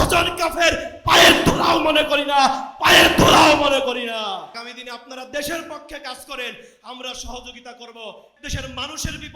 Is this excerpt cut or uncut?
cut